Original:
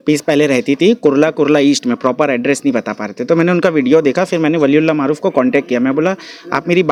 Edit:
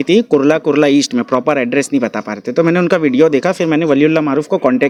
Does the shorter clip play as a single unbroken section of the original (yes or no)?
yes